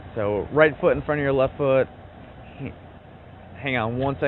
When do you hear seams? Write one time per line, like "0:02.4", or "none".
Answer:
none